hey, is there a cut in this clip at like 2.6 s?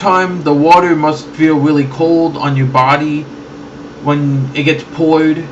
yes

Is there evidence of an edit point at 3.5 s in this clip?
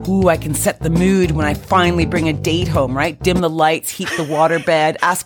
no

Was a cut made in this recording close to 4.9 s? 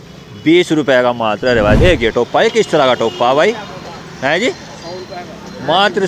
no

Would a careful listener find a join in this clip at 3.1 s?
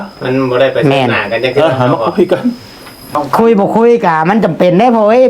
yes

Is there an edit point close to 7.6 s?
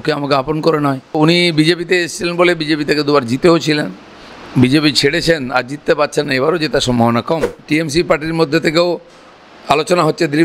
yes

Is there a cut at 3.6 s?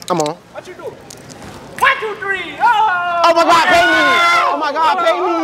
no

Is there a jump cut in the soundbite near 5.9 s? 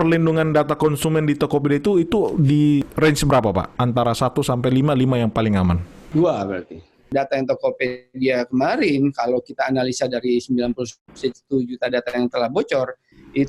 yes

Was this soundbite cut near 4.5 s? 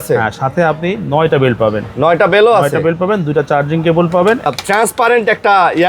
yes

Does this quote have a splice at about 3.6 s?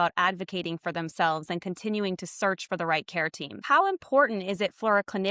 yes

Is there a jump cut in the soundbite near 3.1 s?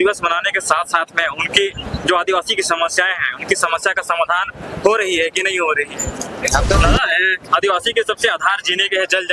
no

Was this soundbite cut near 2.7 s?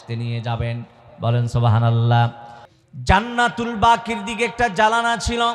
yes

